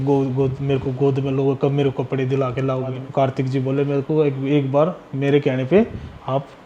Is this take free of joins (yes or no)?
no